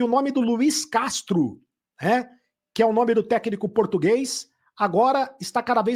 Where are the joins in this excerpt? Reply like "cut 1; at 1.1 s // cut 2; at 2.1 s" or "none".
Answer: none

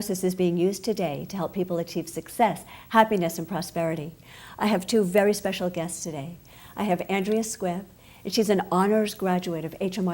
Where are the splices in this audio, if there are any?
cut 1; at 7.2 s

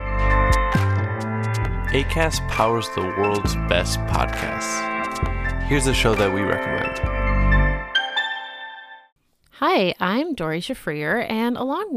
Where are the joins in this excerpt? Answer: cut 1; at 1.2 s

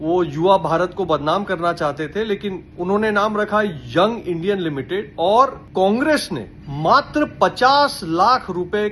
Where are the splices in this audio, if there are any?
none

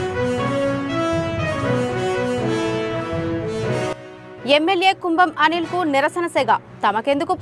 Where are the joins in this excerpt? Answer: cut 1; at 3.9 s

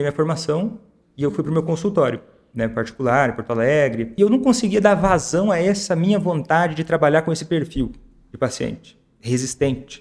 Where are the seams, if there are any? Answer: cut 1; at 4.1 s

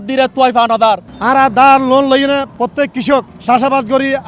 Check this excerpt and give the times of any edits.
cut 1; at 1.1 s // cut 2; at 2.5 s // cut 3; at 3.3 s

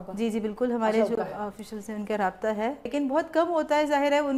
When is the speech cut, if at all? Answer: cut 1; at 2.9 s

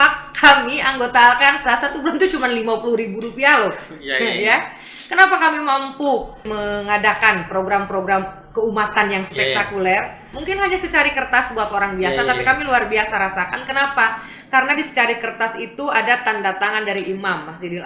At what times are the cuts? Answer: cut 1; at 6.5 s // cut 2; at 10.3 s

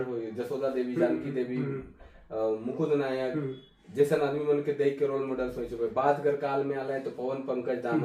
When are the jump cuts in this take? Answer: none

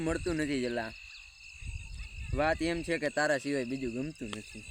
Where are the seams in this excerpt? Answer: none

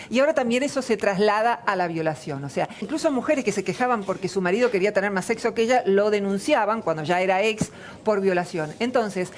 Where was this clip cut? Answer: cut 1; at 2.9 s

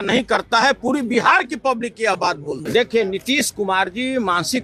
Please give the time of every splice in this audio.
cut 1; at 2.6 s

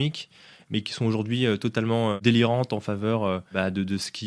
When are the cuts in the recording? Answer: cut 1; at 2.2 s // cut 2; at 3.5 s

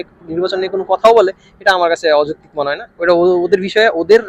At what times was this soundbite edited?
none

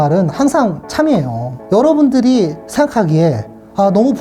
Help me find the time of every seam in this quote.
cut 1; at 2.6 s

